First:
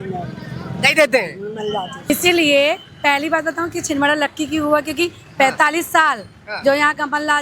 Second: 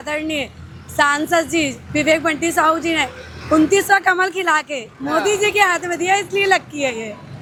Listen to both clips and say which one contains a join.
first; 1 cut; at 2.1 s

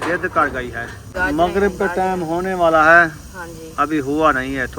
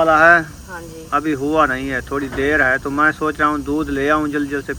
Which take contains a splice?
first; 1 cut; at 1.1 s

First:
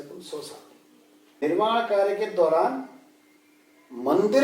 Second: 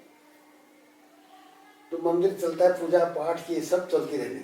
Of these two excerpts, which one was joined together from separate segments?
first; 1 cut; at 1.4 s

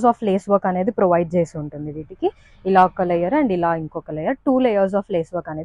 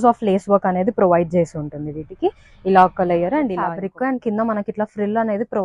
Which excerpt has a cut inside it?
second; 1 cut; at 3.8 s

